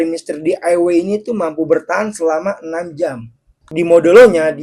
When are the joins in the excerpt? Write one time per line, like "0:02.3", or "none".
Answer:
0:03.5